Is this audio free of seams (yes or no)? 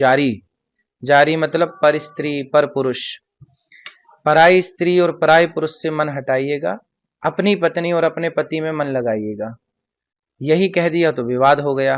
yes